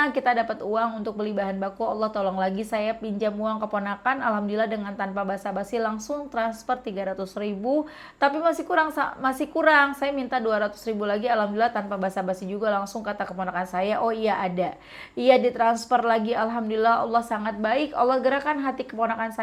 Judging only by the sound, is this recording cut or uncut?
uncut